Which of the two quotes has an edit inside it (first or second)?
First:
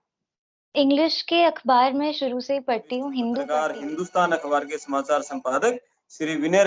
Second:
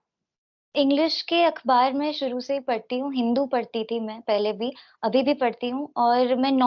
first